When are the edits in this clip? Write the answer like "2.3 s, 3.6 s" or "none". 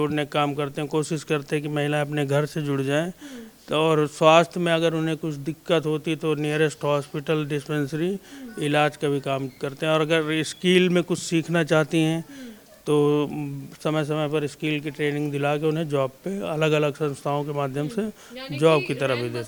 none